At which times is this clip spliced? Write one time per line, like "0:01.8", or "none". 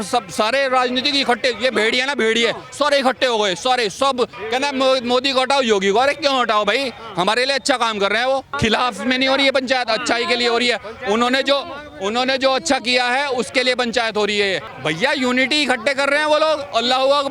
0:04.4
0:08.5
0:14.7